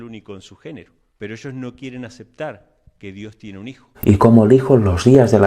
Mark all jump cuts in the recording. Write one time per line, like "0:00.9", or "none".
0:01.0
0:03.9